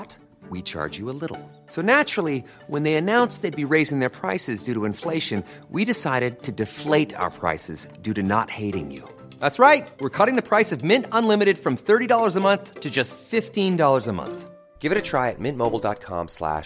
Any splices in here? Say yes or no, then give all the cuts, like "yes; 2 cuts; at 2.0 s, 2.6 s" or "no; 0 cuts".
no; 0 cuts